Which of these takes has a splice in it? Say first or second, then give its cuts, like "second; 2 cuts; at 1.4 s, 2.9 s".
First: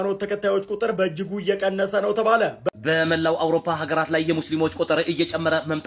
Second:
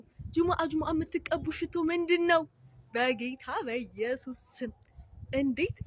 first; 1 cut; at 2.6 s